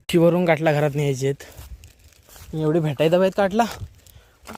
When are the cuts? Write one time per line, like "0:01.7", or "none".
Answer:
none